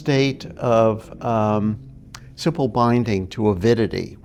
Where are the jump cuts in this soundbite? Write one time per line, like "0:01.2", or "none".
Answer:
none